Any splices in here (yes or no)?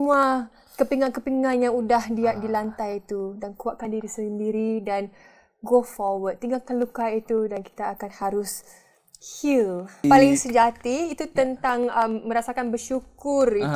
yes